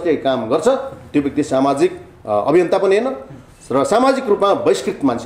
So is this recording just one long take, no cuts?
yes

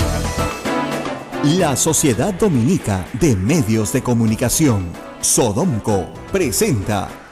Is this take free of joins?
no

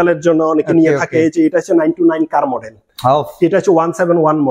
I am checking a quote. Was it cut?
no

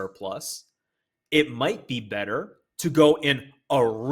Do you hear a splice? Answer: no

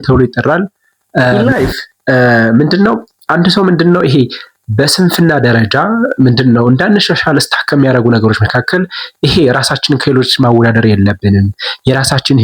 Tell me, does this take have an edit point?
yes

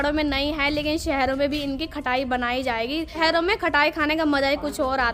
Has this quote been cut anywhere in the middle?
no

